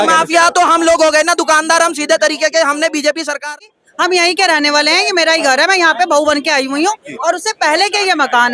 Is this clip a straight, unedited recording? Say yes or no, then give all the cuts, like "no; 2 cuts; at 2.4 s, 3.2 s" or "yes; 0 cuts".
no; 1 cut; at 3.5 s